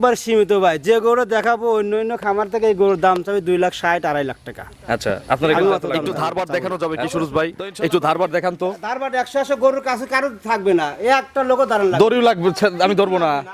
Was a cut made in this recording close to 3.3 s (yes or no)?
no